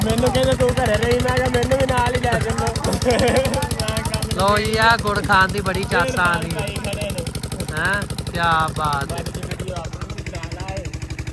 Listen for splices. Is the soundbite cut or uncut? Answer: uncut